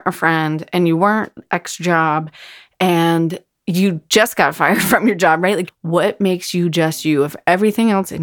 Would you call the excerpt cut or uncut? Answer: cut